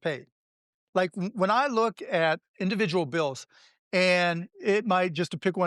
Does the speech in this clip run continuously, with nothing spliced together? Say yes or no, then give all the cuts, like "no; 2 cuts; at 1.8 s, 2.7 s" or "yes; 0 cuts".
no; 1 cut; at 2.5 s